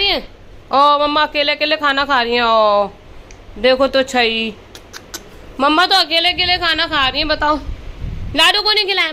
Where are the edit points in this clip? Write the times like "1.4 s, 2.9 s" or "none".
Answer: none